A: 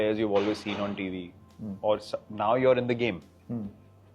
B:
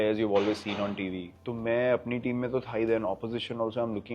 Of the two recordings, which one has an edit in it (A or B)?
B